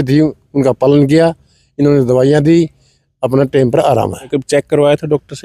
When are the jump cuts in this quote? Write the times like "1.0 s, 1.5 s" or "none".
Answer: 4.4 s